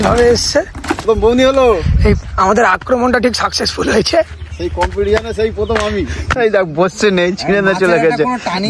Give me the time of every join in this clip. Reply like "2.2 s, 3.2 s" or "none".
1.0 s, 2.2 s, 6.3 s